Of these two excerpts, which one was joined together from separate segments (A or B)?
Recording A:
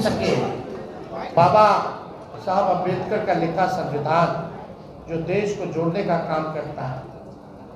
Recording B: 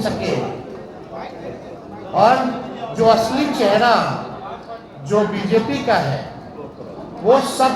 A